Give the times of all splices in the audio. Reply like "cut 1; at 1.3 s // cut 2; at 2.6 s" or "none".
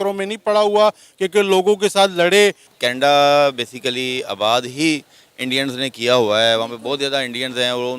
cut 1; at 2.7 s